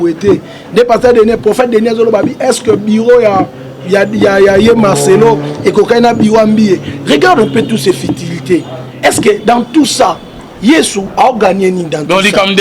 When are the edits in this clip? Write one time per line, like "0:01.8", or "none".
none